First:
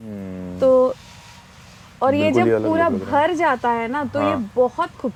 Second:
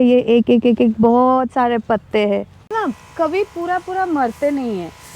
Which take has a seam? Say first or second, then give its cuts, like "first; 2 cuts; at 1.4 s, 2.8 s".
second; 1 cut; at 2.7 s